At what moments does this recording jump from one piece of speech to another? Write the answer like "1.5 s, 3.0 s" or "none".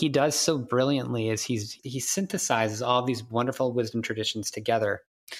1.8 s